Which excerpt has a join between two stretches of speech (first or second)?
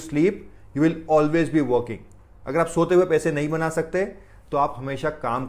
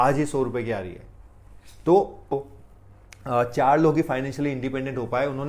second